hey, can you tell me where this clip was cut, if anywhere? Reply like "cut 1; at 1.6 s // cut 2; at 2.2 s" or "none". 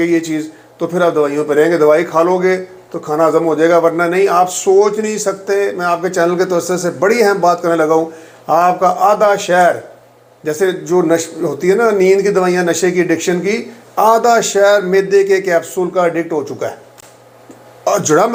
none